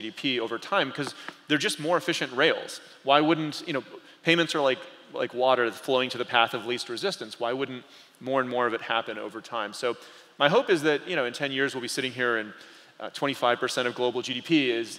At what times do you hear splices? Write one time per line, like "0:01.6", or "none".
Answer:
none